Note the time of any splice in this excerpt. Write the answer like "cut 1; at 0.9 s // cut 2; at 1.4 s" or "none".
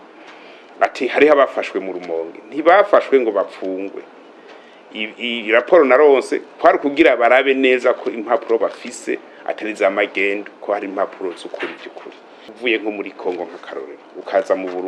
cut 1; at 12.5 s